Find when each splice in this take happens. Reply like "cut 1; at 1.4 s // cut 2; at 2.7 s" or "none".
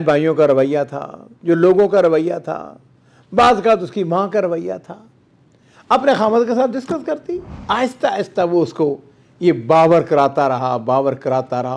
cut 1; at 7.5 s